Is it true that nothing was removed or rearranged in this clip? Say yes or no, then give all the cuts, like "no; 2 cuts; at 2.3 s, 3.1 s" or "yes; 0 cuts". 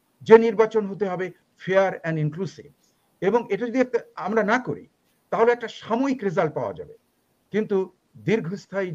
yes; 0 cuts